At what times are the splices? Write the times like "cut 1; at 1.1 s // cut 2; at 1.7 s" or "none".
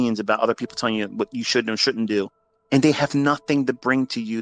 none